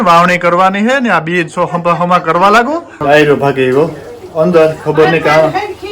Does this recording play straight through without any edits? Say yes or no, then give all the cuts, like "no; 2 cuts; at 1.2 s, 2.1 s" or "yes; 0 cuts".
no; 1 cut; at 3.0 s